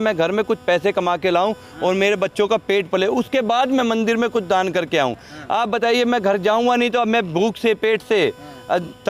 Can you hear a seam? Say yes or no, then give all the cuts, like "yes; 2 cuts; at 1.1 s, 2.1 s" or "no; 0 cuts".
no; 0 cuts